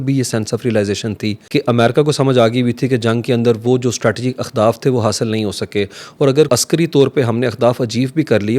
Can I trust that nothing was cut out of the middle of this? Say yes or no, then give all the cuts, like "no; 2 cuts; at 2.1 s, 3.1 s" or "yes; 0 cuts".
no; 2 cuts; at 1.4 s, 6.5 s